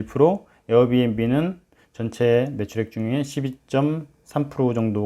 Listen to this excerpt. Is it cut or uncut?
uncut